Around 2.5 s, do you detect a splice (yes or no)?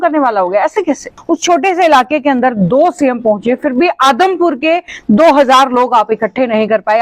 no